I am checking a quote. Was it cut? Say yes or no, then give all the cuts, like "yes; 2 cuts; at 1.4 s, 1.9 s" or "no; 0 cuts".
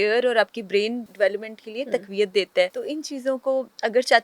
yes; 2 cuts; at 1.0 s, 2.8 s